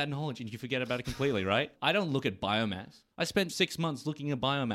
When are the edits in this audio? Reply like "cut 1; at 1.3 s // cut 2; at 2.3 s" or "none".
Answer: cut 1; at 1.7 s // cut 2; at 3.5 s